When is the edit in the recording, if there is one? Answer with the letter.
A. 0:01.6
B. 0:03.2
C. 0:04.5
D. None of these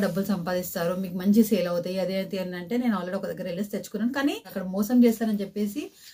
C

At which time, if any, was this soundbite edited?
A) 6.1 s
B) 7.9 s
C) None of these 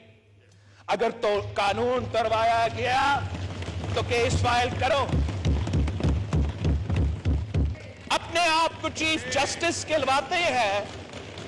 B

